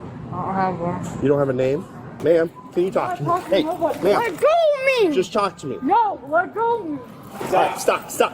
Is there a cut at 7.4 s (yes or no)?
yes